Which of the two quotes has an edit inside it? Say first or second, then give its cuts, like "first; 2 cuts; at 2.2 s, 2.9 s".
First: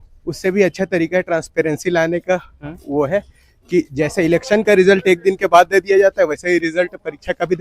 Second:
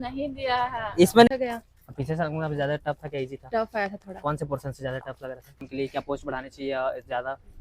second; 2 cuts; at 1.3 s, 5.6 s